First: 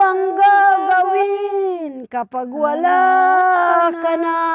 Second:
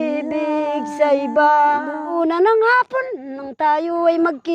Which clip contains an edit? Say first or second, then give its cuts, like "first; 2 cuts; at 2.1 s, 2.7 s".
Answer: second; 1 cut; at 2.1 s